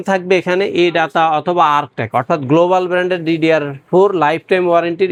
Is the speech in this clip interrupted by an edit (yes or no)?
no